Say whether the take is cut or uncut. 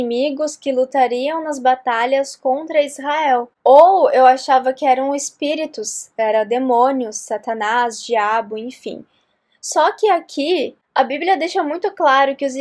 cut